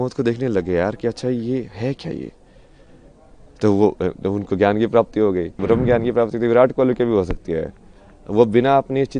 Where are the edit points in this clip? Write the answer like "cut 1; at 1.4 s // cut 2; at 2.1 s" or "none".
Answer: cut 1; at 5.6 s

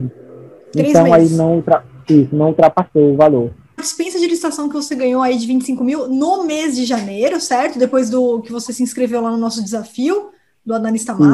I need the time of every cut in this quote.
cut 1; at 3.9 s

